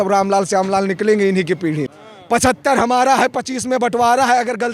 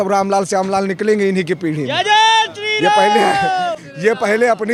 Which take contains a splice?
first; 1 cut; at 1.9 s

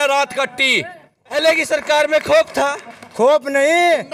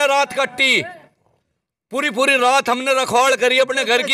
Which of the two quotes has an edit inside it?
first; 1 cut; at 1.3 s

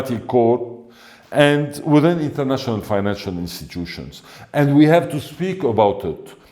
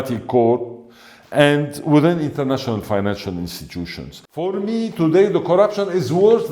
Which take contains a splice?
second; 1 cut; at 4.5 s

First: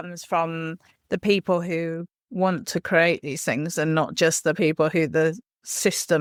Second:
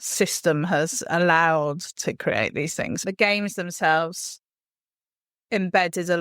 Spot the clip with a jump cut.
second; 1 cut; at 3.0 s

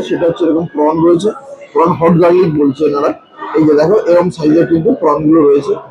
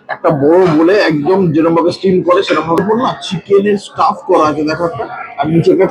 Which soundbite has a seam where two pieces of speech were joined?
second; 1 cut; at 2.8 s

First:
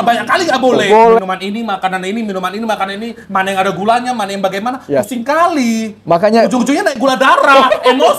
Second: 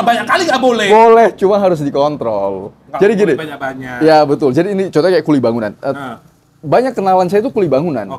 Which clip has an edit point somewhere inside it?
first; 1 cut; at 1.2 s

